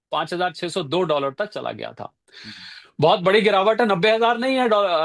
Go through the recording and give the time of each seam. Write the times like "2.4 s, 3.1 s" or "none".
none